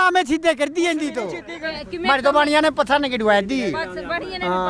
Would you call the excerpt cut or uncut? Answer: cut